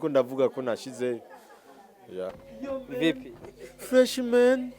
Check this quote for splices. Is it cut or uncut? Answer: cut